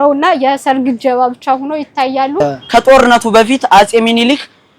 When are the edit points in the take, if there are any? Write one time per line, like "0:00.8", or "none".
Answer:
0:02.4